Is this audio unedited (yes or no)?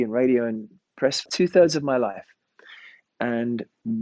no